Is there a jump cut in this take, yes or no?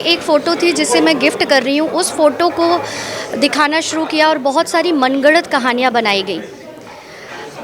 no